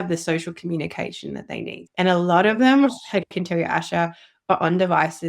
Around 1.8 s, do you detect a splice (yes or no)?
yes